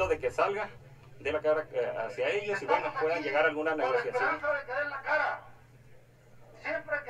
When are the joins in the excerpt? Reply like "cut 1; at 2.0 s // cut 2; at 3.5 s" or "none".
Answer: none